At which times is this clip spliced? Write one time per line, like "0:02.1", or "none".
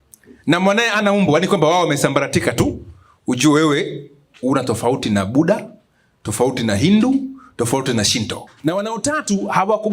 0:08.4